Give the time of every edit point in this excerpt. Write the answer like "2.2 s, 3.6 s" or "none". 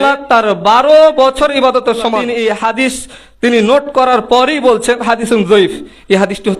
2.3 s